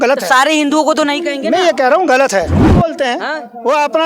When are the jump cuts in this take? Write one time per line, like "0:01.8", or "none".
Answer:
0:02.6